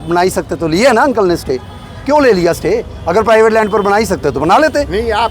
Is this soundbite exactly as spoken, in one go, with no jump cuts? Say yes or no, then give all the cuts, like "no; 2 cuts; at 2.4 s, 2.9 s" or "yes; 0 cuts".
yes; 0 cuts